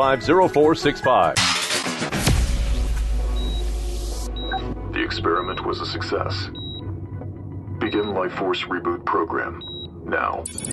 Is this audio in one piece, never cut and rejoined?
no; 1 cut; at 1.4 s

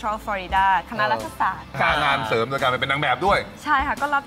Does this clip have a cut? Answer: yes; 1 cut; at 1.7 s

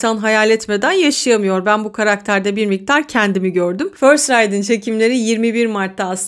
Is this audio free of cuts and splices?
yes; 0 cuts

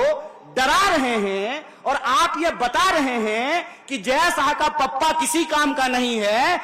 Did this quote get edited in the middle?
no; 0 cuts

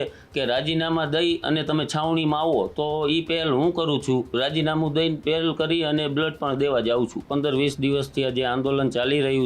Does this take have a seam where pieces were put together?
yes; 1 cut; at 7.2 s

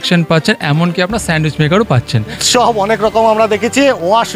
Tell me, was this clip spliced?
yes; 1 cut; at 2.4 s

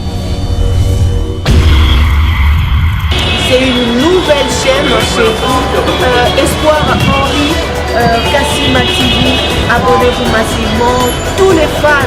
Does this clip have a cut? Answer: no; 0 cuts

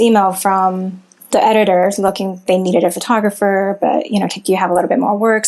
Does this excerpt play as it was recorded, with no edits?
no; 1 cut; at 1.1 s

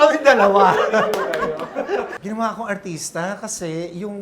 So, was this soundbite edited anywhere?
yes; 1 cut; at 2.1 s

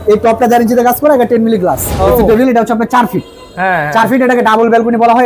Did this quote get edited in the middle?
yes; 1 cut; at 2.1 s

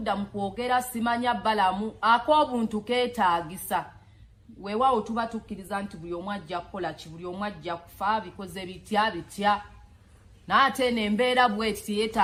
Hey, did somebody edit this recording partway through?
no; 0 cuts

